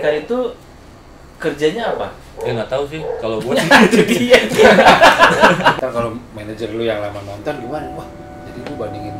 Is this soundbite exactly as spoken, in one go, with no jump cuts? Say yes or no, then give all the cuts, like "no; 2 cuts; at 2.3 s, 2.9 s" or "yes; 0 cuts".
no; 1 cut; at 5.7 s